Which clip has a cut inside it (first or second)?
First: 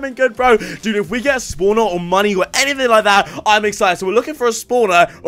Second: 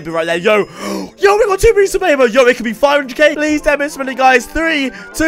second